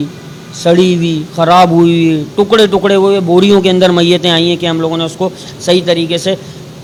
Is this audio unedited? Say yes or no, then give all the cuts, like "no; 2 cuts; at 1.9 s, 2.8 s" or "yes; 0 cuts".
yes; 0 cuts